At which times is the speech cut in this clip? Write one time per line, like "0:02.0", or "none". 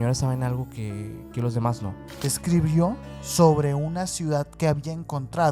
0:02.1